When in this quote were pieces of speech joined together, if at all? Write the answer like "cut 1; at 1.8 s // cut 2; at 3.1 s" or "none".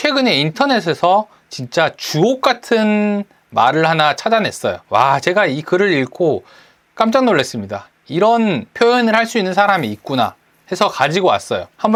none